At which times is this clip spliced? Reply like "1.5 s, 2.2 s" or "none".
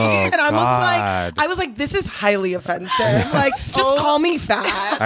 none